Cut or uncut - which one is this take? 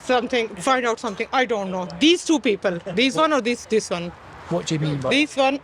uncut